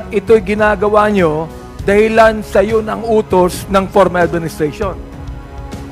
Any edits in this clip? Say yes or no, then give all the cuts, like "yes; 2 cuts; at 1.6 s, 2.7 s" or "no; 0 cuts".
yes; 1 cut; at 4.9 s